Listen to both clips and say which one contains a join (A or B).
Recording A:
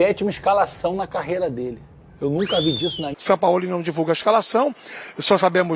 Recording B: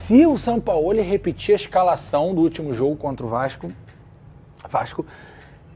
A